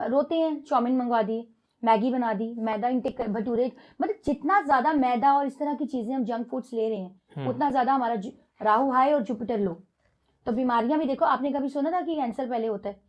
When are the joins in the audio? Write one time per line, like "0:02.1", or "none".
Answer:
none